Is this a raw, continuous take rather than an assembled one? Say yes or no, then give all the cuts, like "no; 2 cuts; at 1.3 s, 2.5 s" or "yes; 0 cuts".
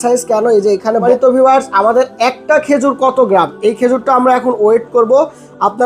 no; 1 cut; at 1.0 s